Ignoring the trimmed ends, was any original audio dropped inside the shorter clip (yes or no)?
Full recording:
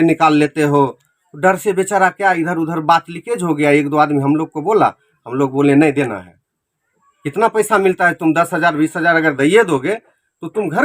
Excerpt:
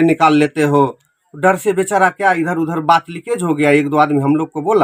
no